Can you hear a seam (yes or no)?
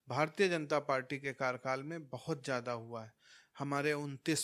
no